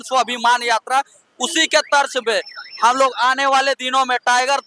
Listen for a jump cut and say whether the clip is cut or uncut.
uncut